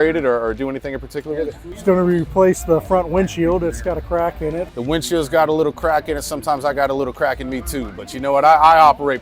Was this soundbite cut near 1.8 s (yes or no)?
yes